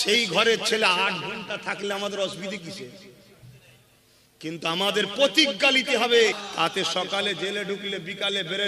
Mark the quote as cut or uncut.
cut